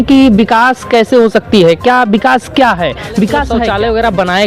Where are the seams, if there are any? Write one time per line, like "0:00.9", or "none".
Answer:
0:03.6